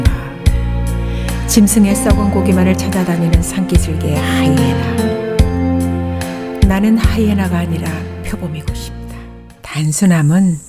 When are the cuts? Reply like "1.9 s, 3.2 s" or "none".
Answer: 9.3 s